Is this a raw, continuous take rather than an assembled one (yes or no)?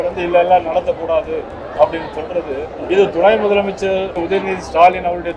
no